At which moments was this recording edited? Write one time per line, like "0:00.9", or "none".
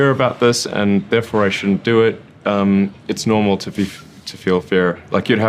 none